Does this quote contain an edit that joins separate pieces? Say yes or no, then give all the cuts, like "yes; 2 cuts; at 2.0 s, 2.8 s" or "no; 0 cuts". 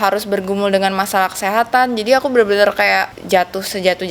yes; 1 cut; at 3.2 s